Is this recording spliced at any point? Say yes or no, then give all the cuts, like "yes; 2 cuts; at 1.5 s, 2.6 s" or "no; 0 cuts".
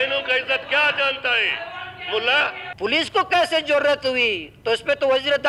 yes; 1 cut; at 2.6 s